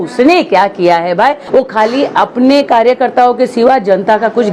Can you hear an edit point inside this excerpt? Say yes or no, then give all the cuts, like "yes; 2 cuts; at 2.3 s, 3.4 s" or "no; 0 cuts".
yes; 1 cut; at 1.4 s